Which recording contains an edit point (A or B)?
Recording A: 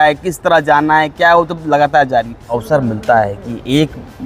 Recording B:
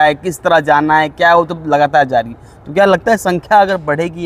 A